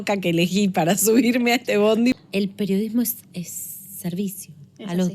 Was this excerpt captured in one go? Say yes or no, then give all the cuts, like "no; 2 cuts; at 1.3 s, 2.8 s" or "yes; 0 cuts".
no; 1 cut; at 2.2 s